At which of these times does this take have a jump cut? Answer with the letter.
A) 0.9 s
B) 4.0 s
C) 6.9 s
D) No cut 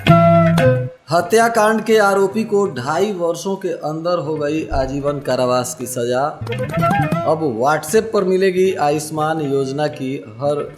A